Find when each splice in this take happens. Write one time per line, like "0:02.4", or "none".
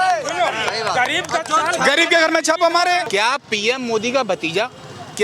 0:03.1